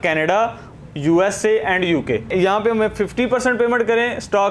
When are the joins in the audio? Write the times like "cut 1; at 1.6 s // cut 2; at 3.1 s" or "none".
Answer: cut 1; at 2.3 s